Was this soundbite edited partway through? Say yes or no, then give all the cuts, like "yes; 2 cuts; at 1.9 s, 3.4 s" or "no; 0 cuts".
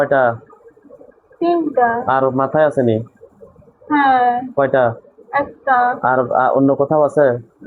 no; 0 cuts